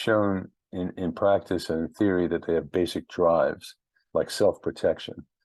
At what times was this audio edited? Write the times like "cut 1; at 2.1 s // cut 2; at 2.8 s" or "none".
none